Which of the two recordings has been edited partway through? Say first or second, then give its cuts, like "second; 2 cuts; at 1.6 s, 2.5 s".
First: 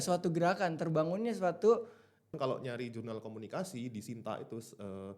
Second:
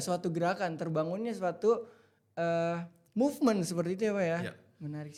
first; 1 cut; at 2.2 s